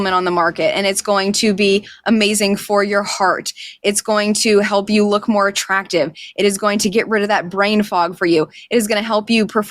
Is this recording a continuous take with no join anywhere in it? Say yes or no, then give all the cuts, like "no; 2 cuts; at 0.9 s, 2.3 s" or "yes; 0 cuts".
yes; 0 cuts